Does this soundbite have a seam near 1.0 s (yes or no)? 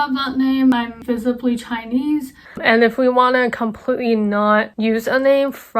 yes